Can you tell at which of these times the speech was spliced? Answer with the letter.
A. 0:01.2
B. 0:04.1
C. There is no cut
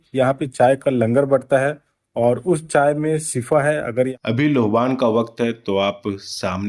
B